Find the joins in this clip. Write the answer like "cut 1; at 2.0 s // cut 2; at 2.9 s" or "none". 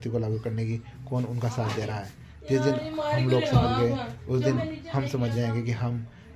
none